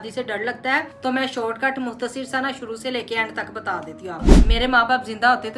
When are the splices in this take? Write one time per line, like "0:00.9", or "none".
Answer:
0:00.9
0:04.4